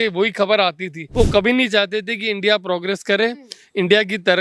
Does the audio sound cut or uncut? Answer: cut